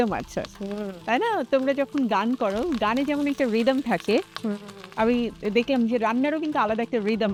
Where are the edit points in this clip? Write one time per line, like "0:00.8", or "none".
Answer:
none